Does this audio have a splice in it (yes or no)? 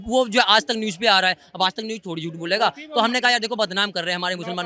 no